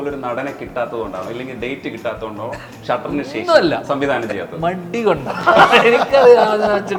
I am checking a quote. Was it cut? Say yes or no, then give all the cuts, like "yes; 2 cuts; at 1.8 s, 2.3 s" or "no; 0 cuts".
no; 0 cuts